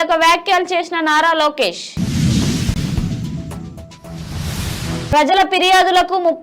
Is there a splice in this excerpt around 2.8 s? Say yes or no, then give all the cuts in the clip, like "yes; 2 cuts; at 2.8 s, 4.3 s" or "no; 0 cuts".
yes; 2 cuts; at 2.8 s, 5.3 s